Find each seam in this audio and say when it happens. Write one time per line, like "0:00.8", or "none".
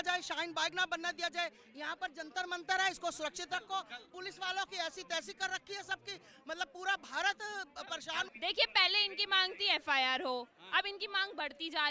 0:08.3